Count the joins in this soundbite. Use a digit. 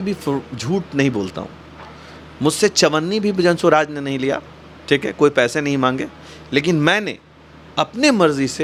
0